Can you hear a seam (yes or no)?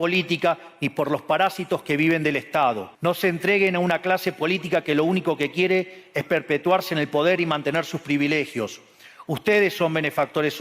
yes